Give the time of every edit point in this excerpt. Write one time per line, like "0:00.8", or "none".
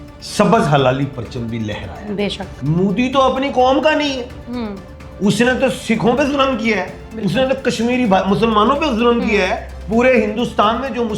0:02.5